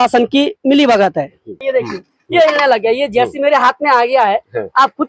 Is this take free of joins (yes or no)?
no